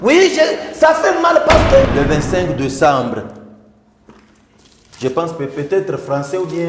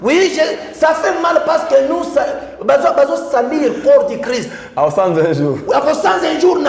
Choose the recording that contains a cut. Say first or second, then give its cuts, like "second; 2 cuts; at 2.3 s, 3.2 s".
first; 1 cut; at 1.9 s